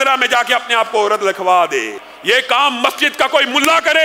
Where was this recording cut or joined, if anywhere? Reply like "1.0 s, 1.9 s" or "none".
2.0 s

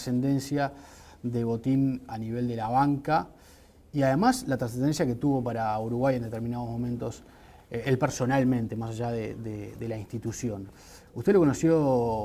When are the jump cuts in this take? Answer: none

